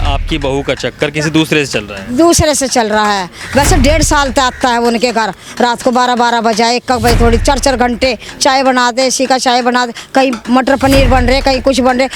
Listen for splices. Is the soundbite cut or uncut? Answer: uncut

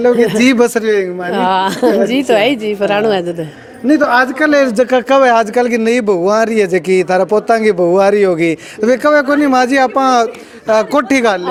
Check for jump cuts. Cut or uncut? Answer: uncut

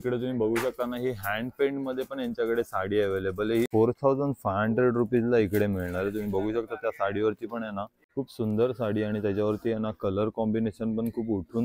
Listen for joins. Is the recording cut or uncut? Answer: cut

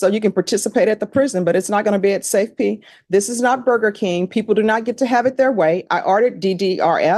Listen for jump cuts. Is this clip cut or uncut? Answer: uncut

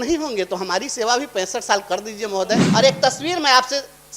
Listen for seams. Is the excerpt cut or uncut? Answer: cut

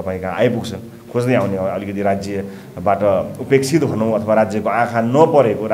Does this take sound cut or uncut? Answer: uncut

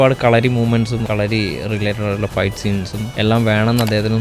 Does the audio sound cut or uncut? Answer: cut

